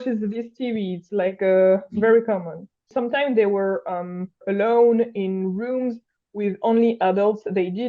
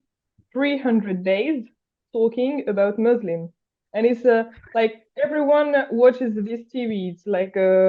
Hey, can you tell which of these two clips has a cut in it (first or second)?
first